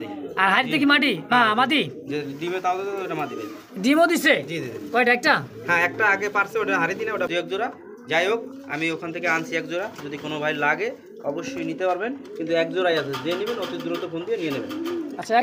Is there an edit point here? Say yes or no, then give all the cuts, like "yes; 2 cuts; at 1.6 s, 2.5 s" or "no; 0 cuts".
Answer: yes; 1 cut; at 7.3 s